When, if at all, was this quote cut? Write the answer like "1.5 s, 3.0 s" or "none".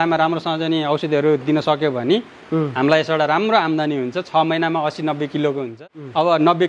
5.8 s